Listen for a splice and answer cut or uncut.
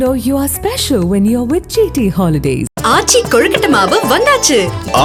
uncut